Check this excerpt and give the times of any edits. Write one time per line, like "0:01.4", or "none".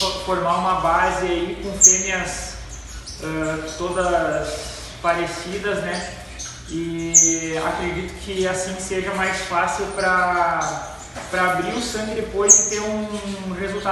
none